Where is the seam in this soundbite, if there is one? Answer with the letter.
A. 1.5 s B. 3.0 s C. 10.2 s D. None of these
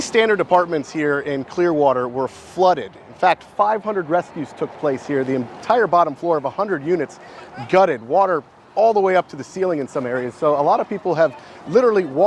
B